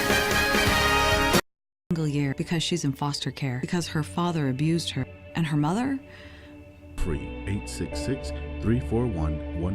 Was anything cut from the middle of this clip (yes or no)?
yes